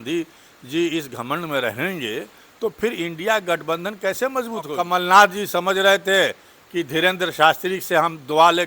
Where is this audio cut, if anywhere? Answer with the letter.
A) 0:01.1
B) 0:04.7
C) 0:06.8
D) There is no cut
B